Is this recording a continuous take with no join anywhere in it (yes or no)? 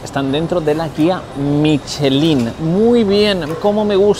yes